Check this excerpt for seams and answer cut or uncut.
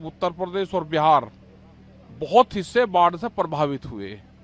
uncut